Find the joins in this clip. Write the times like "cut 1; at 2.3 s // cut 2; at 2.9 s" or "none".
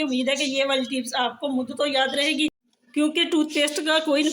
cut 1; at 2.6 s